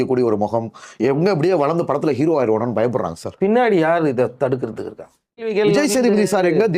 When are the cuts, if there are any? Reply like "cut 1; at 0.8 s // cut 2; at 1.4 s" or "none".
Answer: cut 1; at 5.5 s

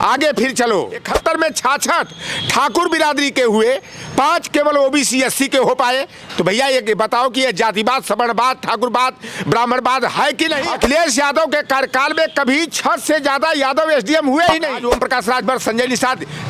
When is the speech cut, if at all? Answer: cut 1; at 1.1 s // cut 2; at 10.7 s // cut 3; at 14.8 s

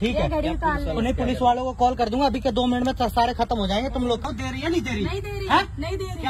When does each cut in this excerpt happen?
cut 1; at 4.2 s

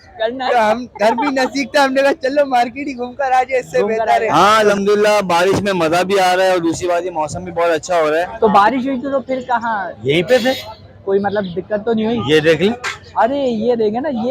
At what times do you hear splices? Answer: cut 1; at 4.3 s // cut 2; at 8.3 s

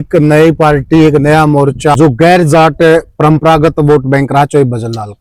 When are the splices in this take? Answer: none

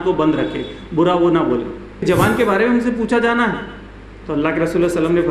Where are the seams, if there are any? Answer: cut 1; at 1.9 s

